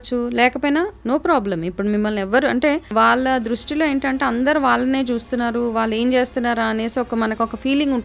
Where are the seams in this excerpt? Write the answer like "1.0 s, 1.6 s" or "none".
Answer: 2.9 s

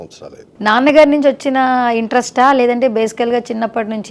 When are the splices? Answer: none

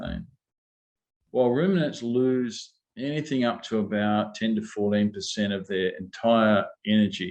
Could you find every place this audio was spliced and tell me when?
1.0 s

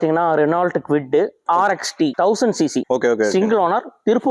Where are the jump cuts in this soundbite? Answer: 2.1 s, 2.9 s

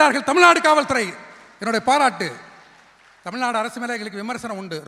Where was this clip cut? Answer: none

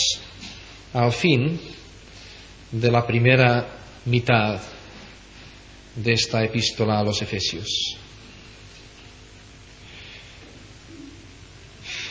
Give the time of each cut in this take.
10.8 s

